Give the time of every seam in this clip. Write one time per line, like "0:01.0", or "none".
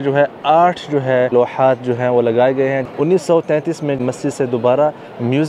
0:01.3
0:02.9
0:04.0